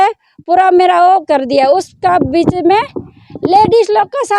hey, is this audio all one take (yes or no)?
yes